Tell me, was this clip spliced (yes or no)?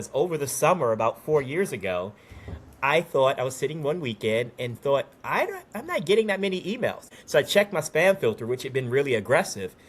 yes